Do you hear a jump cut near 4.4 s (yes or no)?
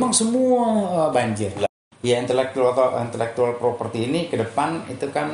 no